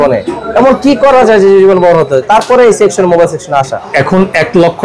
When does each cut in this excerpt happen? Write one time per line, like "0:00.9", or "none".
0:03.8